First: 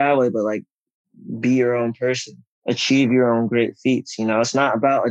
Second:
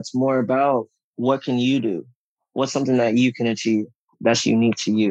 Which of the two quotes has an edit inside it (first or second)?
second